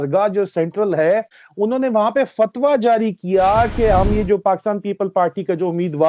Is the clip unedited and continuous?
no; 1 cut; at 1.4 s

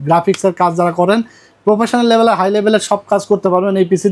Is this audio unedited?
yes; 0 cuts

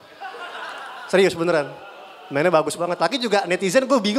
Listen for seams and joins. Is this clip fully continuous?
yes; 0 cuts

